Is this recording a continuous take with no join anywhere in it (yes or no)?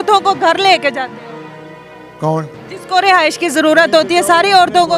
yes